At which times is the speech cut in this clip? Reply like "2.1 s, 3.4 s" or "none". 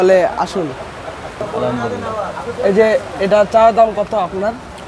1.4 s

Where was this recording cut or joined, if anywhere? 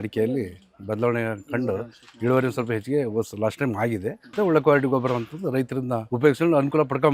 4.3 s, 6.0 s

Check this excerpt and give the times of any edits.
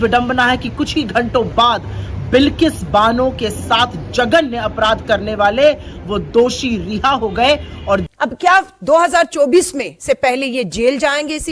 8.1 s

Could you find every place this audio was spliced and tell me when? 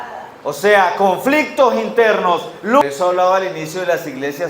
2.8 s

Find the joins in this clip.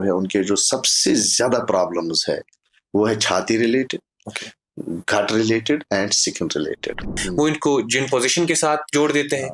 7.2 s

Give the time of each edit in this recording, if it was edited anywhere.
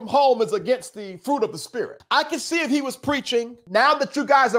none

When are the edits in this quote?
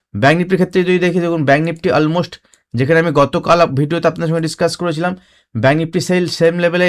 none

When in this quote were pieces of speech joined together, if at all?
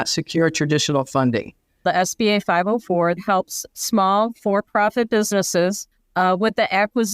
1.8 s, 3.2 s, 5.9 s

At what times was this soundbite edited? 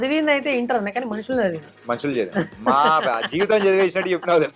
1.7 s

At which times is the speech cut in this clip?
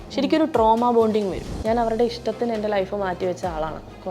1.5 s

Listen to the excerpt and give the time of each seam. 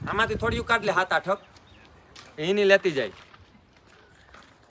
none

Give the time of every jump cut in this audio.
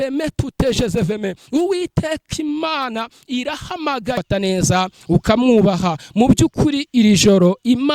4.2 s

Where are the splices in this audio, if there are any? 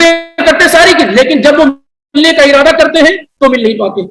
none

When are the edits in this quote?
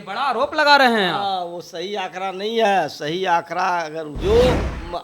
4.0 s

